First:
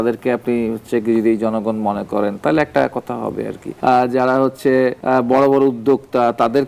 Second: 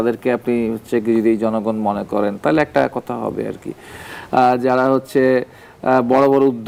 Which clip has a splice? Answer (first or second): first